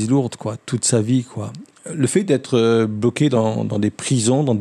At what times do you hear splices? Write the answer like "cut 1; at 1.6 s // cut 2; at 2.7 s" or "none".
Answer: cut 1; at 1.6 s